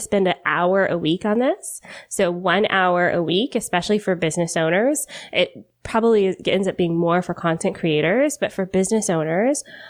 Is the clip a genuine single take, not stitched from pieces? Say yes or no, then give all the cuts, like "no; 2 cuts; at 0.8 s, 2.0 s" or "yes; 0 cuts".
yes; 0 cuts